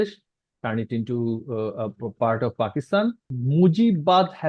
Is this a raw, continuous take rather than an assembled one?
no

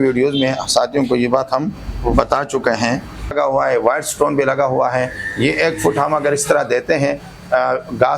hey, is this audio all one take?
no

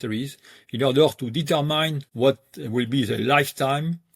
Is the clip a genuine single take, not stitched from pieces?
no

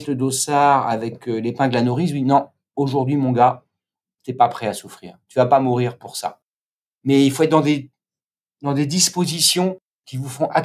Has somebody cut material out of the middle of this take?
yes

